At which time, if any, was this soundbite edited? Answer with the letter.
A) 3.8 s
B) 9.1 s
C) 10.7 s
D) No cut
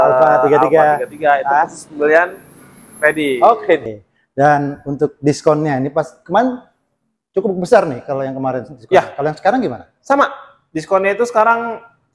A